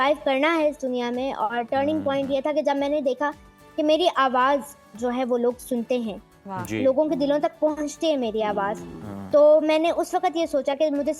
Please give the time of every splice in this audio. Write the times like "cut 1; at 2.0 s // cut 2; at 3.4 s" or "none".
none

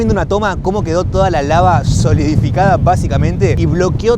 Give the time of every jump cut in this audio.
none

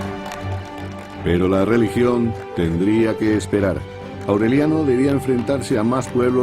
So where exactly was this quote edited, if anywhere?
cut 1; at 5.2 s

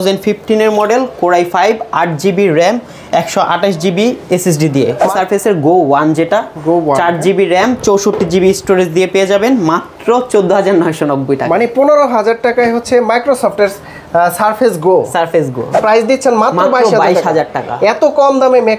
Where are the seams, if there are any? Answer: cut 1; at 5.1 s // cut 2; at 15.7 s

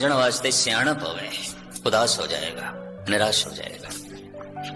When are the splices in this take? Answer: cut 1; at 3.8 s

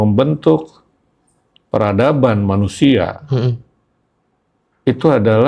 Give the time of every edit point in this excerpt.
none

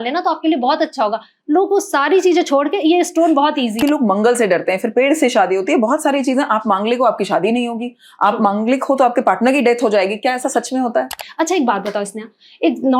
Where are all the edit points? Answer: cut 1; at 3.8 s // cut 2; at 11.2 s

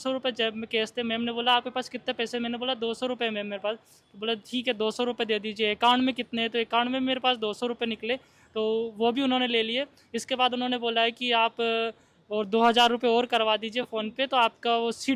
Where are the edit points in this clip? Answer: none

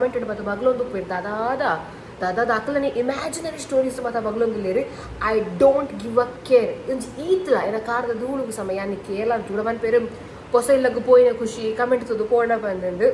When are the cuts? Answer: none

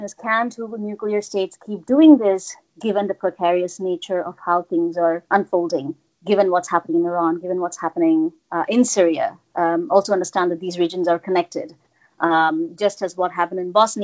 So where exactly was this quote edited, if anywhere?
cut 1; at 5.2 s

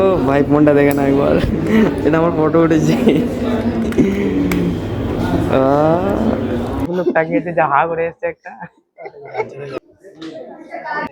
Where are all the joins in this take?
cut 1; at 6.9 s

